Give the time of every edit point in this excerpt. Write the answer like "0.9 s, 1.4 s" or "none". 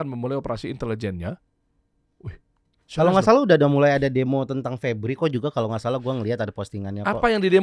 none